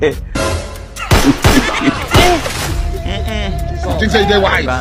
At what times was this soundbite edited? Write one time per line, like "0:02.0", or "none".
none